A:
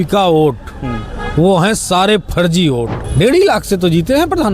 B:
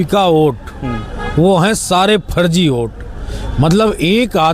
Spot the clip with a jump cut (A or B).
A